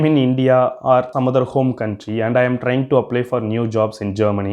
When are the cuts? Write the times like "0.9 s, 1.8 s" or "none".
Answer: 1.1 s